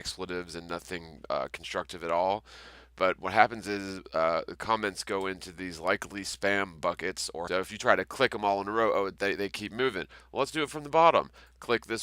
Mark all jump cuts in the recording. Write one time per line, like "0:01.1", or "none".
none